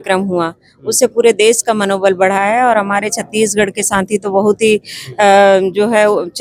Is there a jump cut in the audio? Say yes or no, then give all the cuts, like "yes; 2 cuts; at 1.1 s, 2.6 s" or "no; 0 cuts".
no; 0 cuts